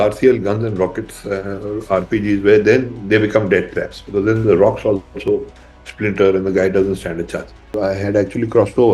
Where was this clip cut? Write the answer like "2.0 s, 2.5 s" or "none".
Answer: 7.8 s